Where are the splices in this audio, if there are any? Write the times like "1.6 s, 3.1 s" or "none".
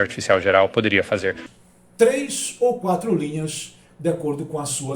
1.5 s